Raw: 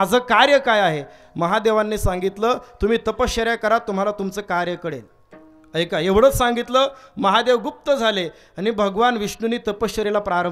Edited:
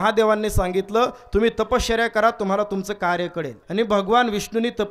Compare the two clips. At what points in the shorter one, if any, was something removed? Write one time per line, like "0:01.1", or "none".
0:03.6